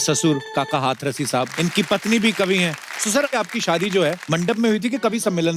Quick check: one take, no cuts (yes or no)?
no